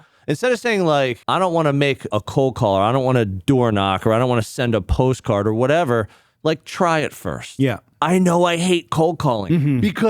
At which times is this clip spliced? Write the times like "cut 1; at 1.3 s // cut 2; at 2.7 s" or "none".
cut 1; at 1.2 s // cut 2; at 2.1 s